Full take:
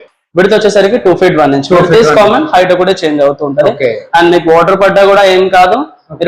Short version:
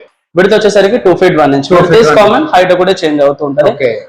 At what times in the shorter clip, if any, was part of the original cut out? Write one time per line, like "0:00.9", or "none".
none